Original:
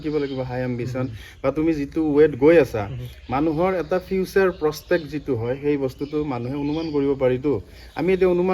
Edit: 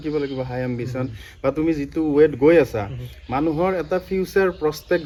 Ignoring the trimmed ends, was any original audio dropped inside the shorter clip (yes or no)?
no